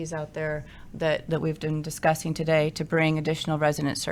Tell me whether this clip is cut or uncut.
uncut